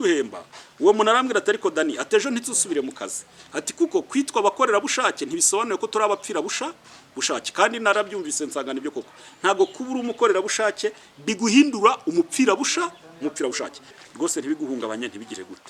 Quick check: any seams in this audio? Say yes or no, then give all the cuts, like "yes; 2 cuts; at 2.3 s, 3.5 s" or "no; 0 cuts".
yes; 1 cut; at 14.0 s